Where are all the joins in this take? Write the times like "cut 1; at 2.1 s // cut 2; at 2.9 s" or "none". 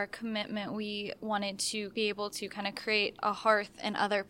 cut 1; at 1.9 s // cut 2; at 3.2 s